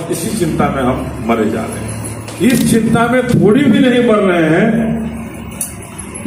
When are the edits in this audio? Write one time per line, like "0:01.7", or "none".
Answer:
0:02.2